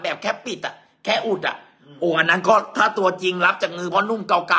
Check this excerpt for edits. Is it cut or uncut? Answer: uncut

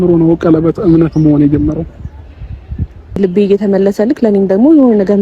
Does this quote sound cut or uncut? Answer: cut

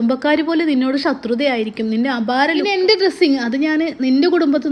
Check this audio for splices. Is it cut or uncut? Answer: cut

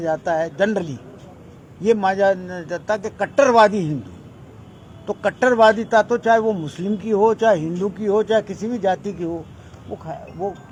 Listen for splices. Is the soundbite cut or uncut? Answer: uncut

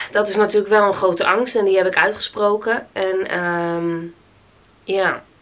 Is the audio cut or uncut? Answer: uncut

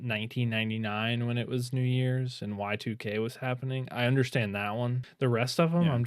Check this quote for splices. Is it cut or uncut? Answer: cut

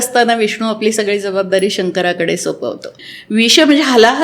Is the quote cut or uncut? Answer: cut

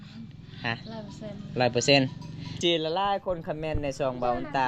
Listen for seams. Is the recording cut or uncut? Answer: cut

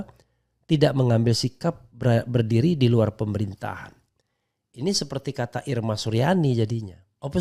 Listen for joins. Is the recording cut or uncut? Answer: uncut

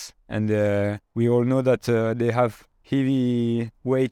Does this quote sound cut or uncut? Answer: cut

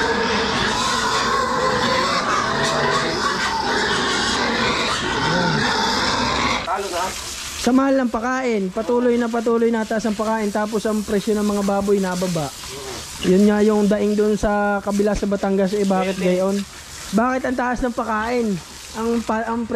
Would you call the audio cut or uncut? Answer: cut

